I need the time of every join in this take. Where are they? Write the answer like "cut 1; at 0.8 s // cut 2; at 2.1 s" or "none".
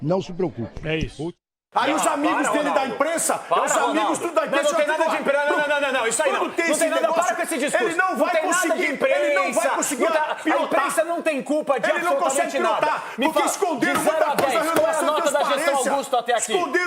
cut 1; at 1.5 s